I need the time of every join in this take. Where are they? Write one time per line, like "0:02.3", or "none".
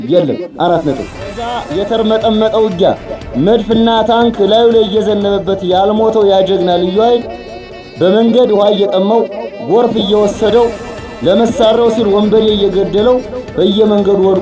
0:01.6